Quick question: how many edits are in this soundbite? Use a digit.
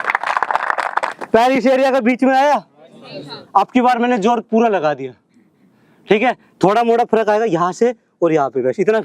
1